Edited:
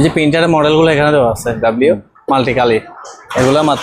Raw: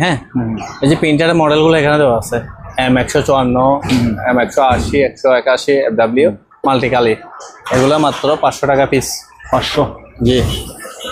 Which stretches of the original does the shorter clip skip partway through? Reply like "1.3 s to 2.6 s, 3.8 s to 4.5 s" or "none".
2.4 s to 5.9 s